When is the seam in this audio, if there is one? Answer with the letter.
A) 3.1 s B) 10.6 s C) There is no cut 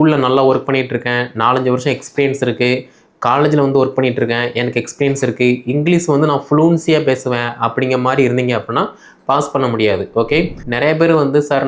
B